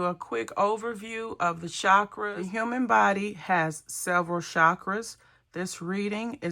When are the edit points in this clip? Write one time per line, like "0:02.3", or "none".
0:02.3